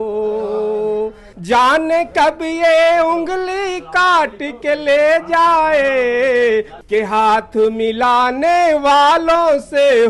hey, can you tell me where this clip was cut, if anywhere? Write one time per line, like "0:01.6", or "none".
0:01.3
0:06.8